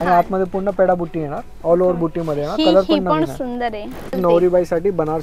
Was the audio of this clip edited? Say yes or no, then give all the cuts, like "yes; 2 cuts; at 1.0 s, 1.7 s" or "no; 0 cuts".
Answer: yes; 1 cut; at 4.1 s